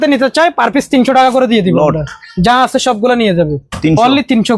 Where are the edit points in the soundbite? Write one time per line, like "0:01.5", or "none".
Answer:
none